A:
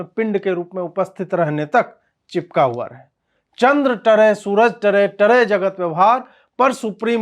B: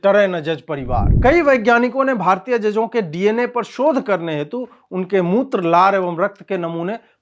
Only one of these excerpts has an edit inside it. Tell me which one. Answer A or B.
B